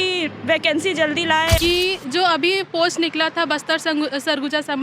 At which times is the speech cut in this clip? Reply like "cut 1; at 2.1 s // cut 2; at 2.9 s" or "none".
cut 1; at 1.6 s